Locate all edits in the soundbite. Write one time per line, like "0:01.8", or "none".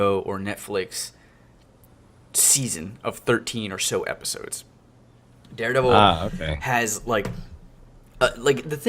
0:03.2